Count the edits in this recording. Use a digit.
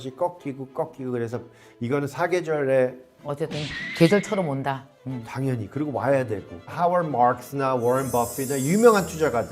1